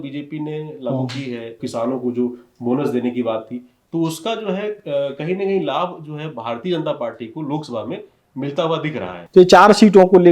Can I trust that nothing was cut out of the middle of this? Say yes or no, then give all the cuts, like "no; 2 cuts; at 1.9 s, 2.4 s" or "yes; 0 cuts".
no; 2 cuts; at 1.6 s, 9.2 s